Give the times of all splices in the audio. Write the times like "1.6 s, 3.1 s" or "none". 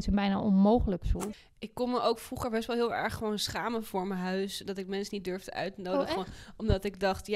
1.1 s